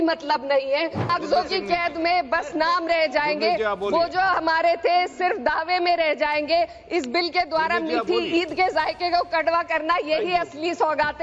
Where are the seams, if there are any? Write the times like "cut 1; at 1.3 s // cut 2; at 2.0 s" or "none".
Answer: cut 1; at 1.1 s